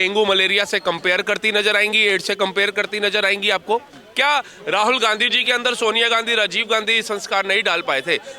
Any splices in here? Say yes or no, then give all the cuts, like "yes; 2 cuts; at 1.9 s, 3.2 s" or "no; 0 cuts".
yes; 1 cut; at 4.0 s